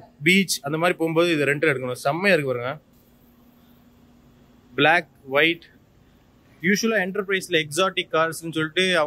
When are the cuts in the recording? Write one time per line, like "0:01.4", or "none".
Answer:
none